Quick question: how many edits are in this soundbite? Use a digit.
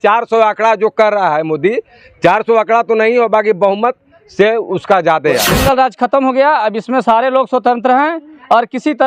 1